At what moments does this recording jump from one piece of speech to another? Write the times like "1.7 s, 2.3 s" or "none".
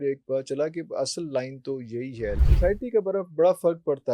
2.5 s